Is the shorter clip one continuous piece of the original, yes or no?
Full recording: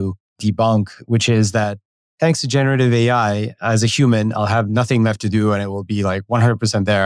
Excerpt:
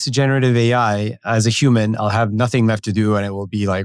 yes